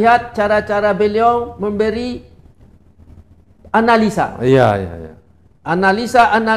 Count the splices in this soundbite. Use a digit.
0